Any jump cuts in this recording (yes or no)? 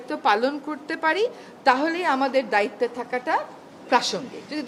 no